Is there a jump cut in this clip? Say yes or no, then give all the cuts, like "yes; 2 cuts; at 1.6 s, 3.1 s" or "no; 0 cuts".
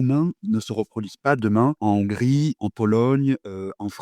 no; 0 cuts